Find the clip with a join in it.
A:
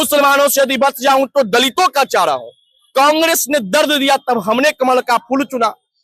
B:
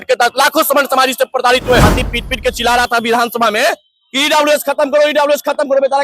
B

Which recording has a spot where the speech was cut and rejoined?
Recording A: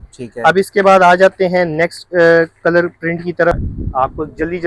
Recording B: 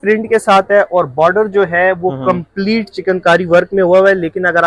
A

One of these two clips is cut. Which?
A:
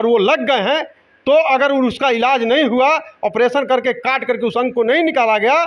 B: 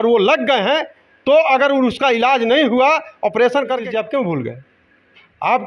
B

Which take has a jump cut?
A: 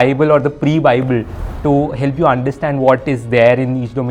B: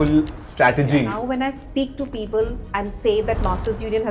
B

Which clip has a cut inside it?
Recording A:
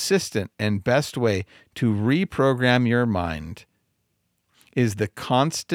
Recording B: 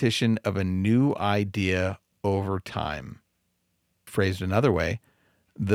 B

